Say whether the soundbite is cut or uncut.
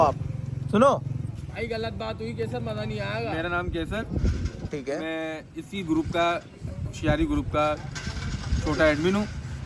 uncut